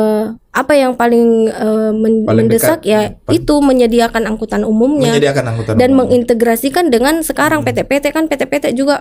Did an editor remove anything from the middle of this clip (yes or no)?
no